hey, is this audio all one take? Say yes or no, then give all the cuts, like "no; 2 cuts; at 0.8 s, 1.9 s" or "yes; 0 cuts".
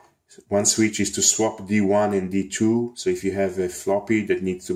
yes; 0 cuts